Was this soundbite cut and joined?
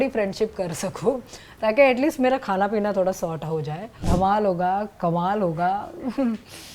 yes; 1 cut; at 4.1 s

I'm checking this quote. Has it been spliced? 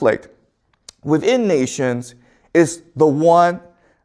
no; 0 cuts

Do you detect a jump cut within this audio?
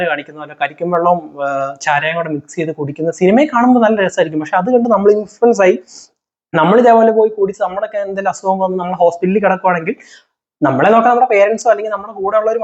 no; 0 cuts

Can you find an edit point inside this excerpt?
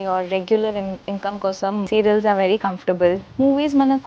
yes; 2 cuts; at 1.9 s, 3.3 s

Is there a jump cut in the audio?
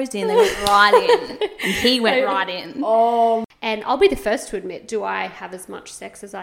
yes; 1 cut; at 3.5 s

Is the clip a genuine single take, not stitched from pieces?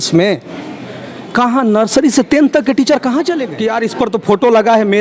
no; 1 cut; at 3.5 s

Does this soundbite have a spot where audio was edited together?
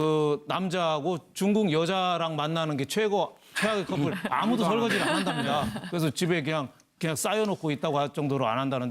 yes; 1 cut; at 4.7 s

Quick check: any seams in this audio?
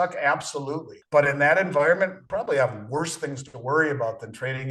yes; 2 cuts; at 0.9 s, 2.2 s

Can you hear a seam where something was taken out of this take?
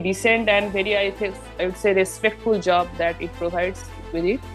no; 0 cuts

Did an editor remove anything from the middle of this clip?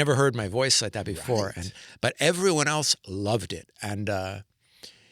no; 0 cuts

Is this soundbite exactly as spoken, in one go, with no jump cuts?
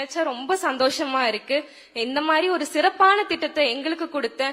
yes; 0 cuts

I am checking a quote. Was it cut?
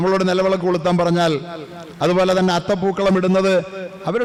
no; 0 cuts

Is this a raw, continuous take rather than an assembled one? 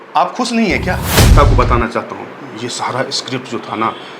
no; 1 cut; at 1.3 s

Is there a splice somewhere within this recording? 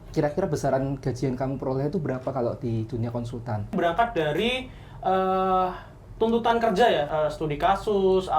yes; 2 cuts; at 3.7 s, 7.1 s

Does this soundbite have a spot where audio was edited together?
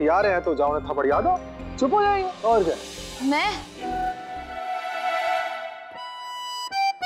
yes; 1 cut; at 4.0 s

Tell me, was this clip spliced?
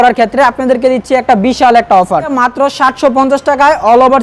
yes; 1 cut; at 2.3 s

